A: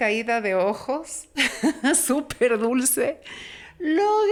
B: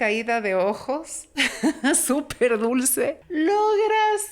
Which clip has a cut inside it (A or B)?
B